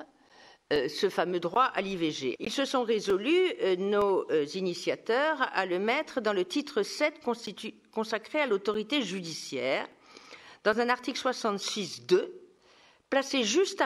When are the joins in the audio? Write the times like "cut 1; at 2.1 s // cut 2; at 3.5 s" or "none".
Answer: cut 1; at 2.4 s